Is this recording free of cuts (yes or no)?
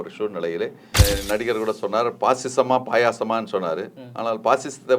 no